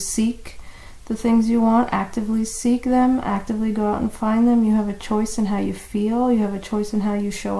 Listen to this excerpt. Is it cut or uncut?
uncut